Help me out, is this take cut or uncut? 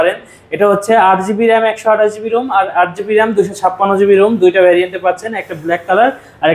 uncut